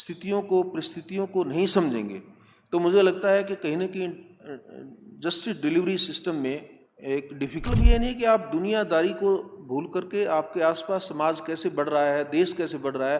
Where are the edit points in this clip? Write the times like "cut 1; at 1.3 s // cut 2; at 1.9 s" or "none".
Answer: cut 1; at 7.6 s